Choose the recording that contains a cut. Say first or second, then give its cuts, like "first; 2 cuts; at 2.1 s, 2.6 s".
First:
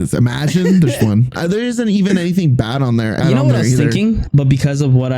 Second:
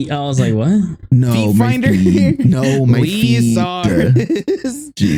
first; 3 cuts; at 1.3 s, 3.2 s, 4.2 s